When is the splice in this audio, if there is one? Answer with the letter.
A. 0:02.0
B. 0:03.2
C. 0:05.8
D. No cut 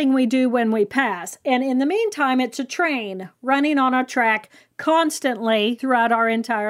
C